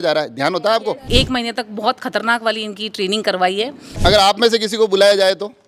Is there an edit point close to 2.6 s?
no; 2 cuts; at 1.0 s, 3.8 s

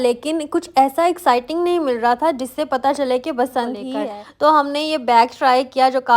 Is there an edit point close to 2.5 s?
no; 1 cut; at 3.9 s

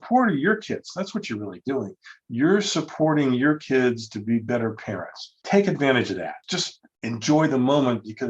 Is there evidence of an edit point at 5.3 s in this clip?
yes; 2 cuts; at 5.3 s, 6.5 s

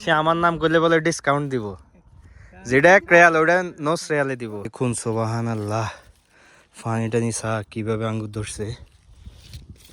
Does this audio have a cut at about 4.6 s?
yes; 1 cut; at 4.6 s

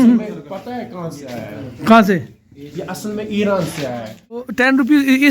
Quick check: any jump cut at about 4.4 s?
yes; 1 cut; at 4.4 s

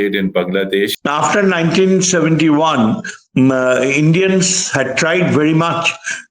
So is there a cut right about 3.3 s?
no; 1 cut; at 0.9 s

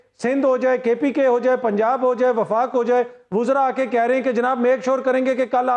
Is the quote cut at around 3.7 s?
no; 0 cuts

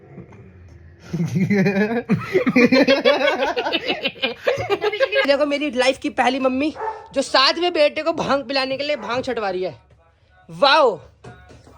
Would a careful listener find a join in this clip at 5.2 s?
yes; 1 cut; at 5.2 s

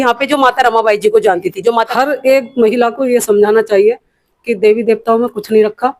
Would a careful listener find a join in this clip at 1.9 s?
yes; 1 cut; at 1.9 s

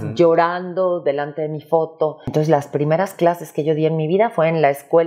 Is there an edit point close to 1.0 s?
no; 1 cut; at 2.3 s

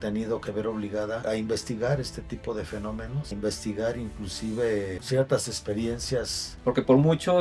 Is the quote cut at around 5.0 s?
yes; 4 cuts; at 1.2 s, 3.3 s, 5.0 s, 6.4 s

